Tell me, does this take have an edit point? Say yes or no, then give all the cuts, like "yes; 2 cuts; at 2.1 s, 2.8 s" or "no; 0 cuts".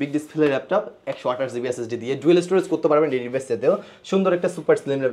no; 0 cuts